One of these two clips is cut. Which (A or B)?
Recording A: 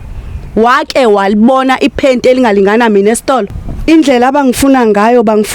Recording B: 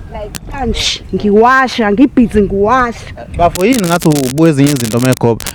A